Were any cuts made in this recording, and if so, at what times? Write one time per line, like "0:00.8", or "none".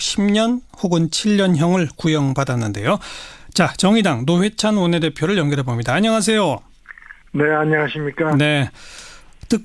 none